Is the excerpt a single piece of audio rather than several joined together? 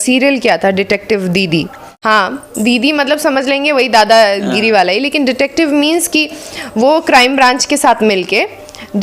no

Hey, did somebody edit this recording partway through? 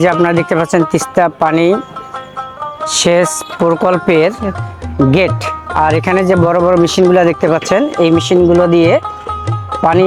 no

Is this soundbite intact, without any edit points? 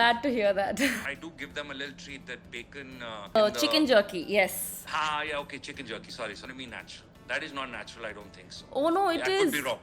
no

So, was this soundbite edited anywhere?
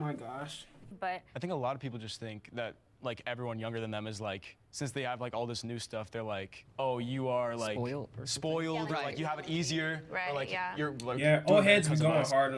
yes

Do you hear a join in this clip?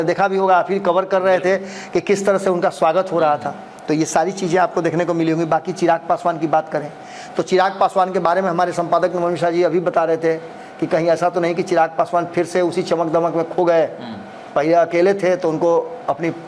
no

